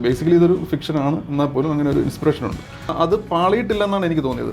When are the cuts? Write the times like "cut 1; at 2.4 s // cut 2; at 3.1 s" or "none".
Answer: cut 1; at 2.9 s